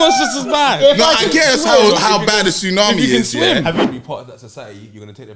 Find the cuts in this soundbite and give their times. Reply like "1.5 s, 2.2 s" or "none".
3.8 s